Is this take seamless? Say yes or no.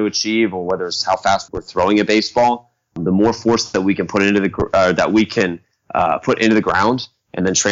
no